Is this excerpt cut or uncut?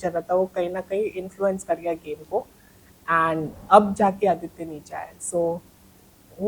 uncut